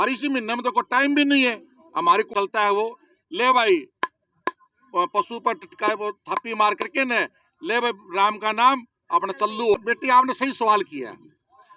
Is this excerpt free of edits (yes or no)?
no